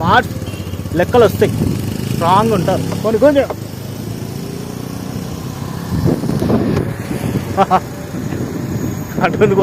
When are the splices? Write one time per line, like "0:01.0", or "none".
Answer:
none

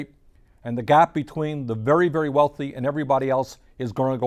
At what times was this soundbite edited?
none

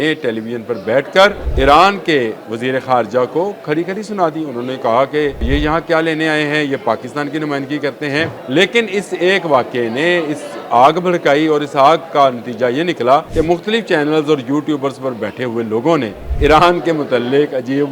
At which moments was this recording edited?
0:01.4
0:05.5
0:08.4
0:13.3
0:16.2

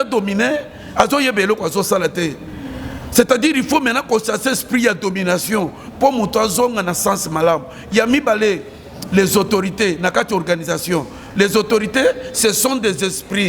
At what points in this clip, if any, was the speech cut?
none

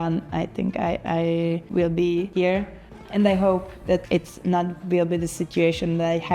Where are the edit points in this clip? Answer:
0:01.6
0:02.6
0:04.0

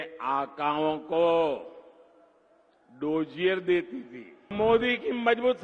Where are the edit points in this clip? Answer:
0:04.5

